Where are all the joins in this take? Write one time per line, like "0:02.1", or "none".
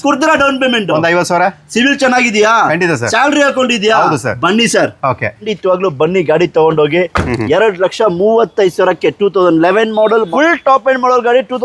0:05.5
0:10.3